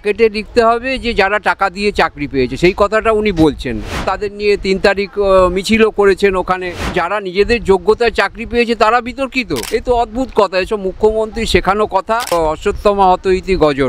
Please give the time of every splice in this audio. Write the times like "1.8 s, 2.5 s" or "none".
4.1 s, 6.9 s, 9.6 s, 12.4 s